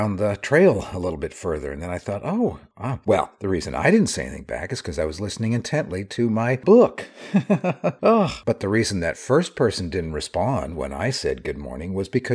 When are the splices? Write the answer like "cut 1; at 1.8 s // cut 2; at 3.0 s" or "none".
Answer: none